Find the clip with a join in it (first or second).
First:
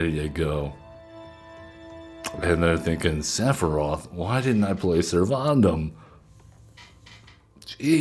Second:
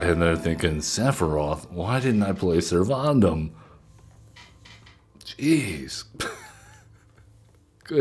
first